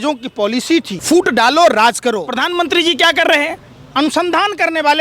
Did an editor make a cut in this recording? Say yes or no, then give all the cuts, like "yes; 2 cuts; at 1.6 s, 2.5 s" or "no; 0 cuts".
yes; 2 cuts; at 0.9 s, 2.3 s